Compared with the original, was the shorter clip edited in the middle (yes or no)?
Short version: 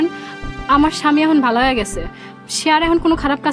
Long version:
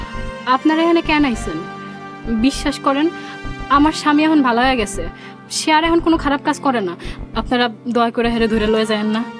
no